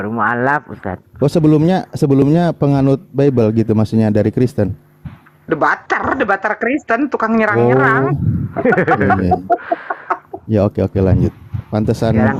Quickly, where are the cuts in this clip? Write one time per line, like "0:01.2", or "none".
none